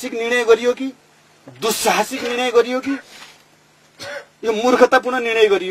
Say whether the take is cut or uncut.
uncut